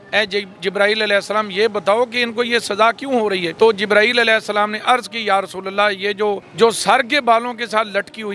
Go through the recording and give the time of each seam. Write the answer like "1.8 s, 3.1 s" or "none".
3.5 s, 6.5 s